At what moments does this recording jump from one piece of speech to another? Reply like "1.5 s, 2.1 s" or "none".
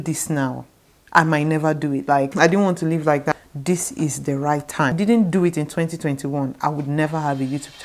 2.3 s, 3.3 s, 5.0 s

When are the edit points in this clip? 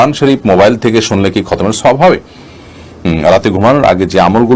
2.5 s

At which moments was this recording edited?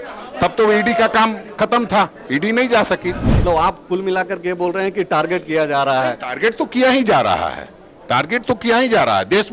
3.3 s

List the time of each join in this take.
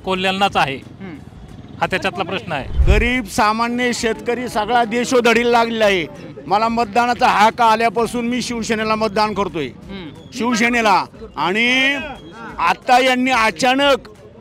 2.7 s

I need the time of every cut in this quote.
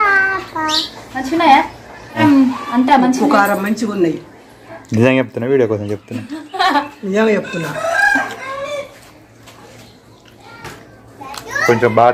2.2 s, 10.7 s

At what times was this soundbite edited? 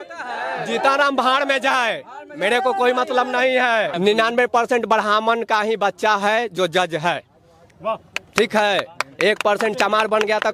3.9 s

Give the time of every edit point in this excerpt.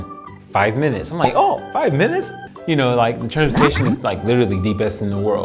2.4 s

